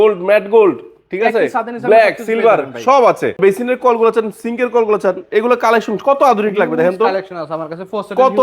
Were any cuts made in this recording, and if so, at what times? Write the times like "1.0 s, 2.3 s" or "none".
3.4 s